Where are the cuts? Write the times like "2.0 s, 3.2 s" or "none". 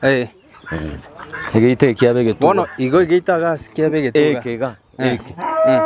none